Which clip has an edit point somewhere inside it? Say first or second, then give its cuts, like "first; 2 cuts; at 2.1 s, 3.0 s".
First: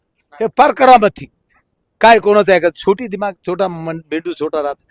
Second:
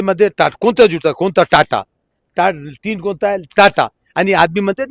second; 1 cut; at 2.2 s